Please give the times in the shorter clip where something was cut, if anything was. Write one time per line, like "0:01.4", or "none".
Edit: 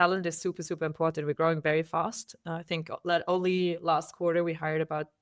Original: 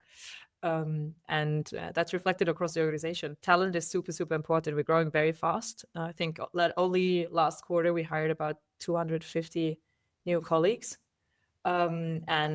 none